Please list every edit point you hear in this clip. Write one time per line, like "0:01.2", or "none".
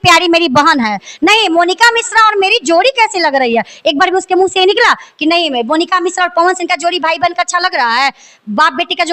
none